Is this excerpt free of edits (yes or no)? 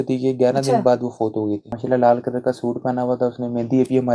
no